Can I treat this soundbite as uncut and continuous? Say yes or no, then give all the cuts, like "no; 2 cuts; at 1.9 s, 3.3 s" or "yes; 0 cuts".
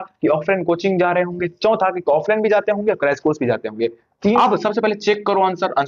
no; 1 cut; at 4.4 s